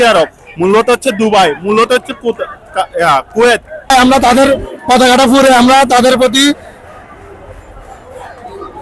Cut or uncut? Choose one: cut